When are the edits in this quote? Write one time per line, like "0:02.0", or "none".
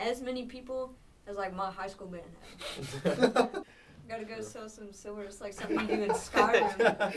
0:03.6

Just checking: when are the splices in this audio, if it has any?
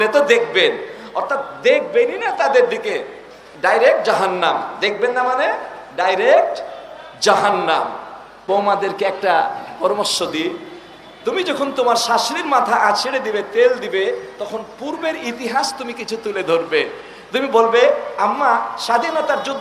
0:08.5

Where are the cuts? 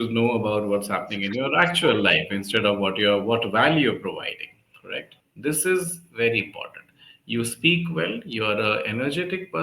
0:05.1

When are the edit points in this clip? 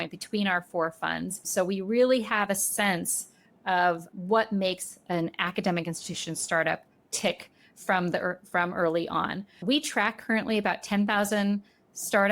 0:01.5
0:04.1
0:09.6

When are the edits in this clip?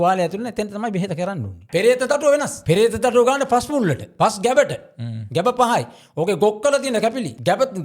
0:01.6

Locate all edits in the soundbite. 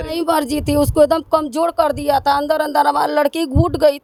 none

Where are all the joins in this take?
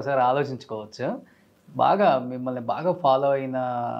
none

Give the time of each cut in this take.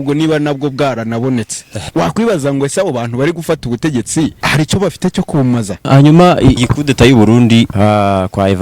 0:01.8
0:04.4
0:05.9
0:06.6
0:07.7

